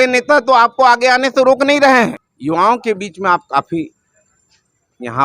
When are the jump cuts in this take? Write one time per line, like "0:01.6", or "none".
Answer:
0:02.3